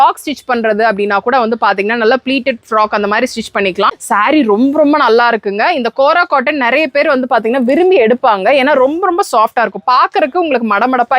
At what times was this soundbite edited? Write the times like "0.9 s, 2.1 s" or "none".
4.0 s